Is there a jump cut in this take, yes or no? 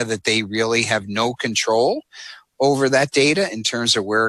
no